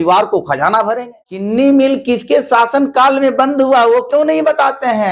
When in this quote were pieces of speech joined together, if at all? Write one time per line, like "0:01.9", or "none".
0:01.5